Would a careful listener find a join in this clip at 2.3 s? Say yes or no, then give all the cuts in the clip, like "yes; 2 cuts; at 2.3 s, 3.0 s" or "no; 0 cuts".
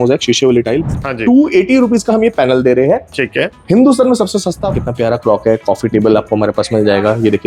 no; 2 cuts; at 0.9 s, 4.8 s